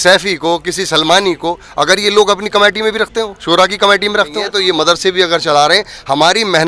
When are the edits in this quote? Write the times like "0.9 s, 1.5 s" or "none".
4.5 s

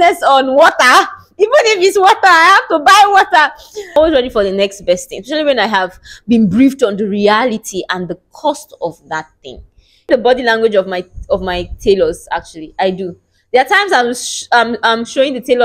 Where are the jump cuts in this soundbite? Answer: 3.9 s, 10.1 s

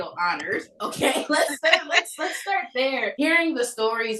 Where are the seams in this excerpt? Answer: 3.1 s

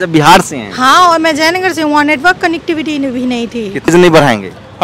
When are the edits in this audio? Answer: 3.9 s

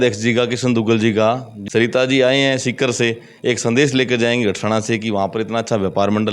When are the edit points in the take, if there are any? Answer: 1.5 s

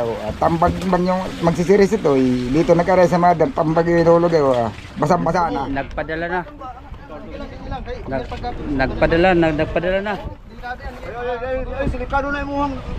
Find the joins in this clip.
5.7 s

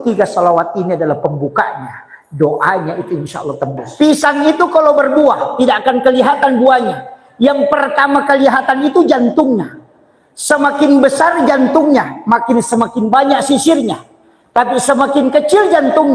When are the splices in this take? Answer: 3.9 s

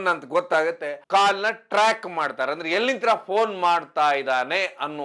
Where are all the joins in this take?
0.9 s

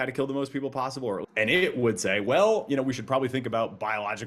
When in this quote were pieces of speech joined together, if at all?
1.3 s

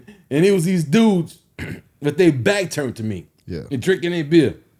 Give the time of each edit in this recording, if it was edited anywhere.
none

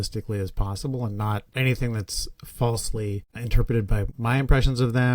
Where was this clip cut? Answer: 4.1 s

